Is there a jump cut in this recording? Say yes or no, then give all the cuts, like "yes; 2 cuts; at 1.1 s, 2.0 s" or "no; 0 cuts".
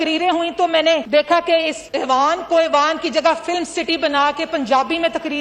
yes; 2 cuts; at 1.0 s, 1.8 s